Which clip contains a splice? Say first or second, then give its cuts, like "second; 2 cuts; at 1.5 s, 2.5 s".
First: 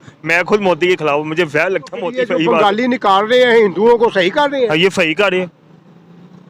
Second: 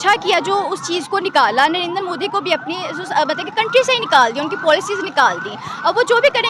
first; 1 cut; at 2.0 s